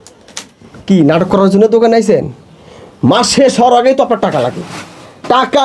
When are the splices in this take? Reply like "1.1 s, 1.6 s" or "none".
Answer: none

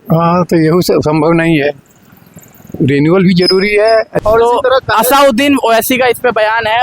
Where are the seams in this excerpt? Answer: 4.1 s

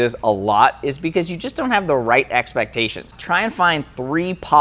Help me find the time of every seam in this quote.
3.2 s

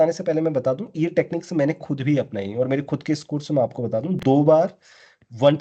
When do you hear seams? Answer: none

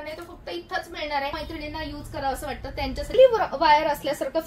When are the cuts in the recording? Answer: 1.4 s, 3.2 s

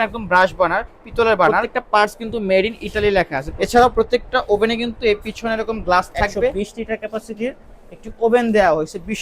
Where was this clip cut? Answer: 1.6 s, 3.5 s, 6.5 s

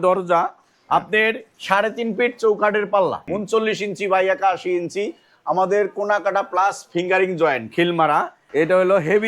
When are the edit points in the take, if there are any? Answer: 3.2 s, 8.4 s

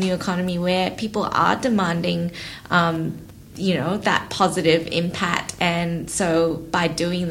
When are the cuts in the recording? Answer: none

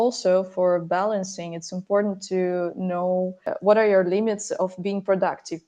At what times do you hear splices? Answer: 3.5 s

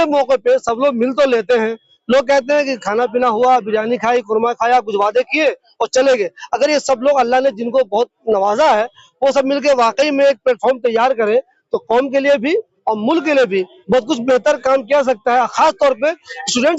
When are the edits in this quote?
none

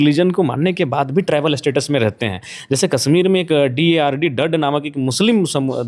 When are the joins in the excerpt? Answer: none

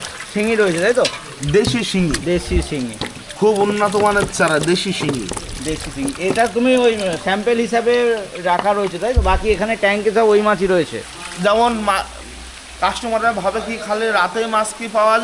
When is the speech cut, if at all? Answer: none

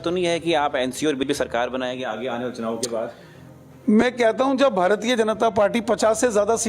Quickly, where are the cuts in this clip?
1.3 s

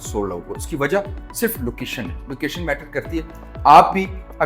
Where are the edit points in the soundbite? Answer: none

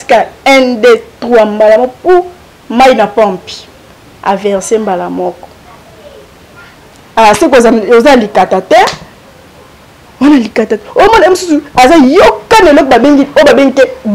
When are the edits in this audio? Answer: 7.0 s

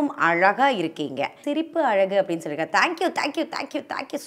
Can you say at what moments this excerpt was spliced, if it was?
1.4 s

